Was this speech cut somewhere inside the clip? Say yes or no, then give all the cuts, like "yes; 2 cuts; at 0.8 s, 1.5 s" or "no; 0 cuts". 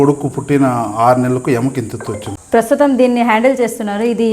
yes; 1 cut; at 2.4 s